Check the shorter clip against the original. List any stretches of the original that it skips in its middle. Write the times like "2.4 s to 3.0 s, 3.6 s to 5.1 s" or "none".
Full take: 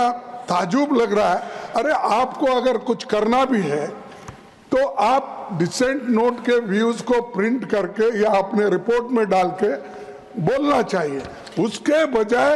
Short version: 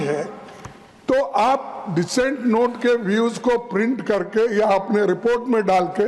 none